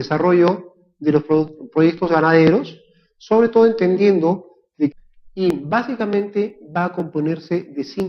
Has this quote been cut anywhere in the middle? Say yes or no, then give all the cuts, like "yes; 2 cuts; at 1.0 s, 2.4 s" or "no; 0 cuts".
no; 0 cuts